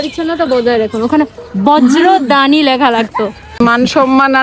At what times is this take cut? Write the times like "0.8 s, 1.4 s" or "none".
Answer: 3.4 s